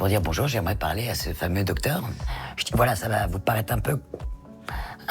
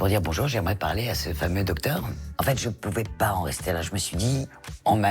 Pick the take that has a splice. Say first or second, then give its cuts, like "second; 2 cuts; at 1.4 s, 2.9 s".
second; 1 cut; at 2.3 s